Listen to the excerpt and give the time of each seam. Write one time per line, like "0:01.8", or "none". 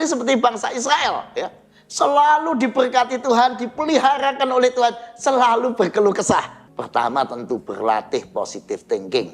0:06.6